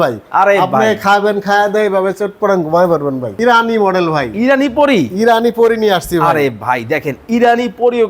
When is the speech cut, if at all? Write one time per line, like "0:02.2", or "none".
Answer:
0:03.4